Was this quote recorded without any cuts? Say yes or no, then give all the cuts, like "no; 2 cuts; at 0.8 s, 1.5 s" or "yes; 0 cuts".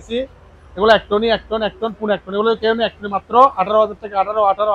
yes; 0 cuts